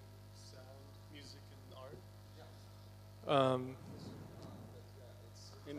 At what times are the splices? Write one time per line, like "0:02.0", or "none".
0:01.7